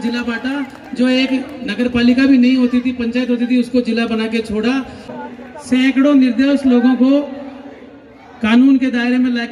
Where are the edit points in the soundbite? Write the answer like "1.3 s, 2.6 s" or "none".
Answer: 5.1 s